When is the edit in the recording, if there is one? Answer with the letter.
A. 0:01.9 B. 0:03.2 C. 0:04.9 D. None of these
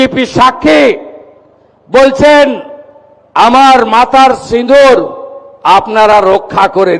D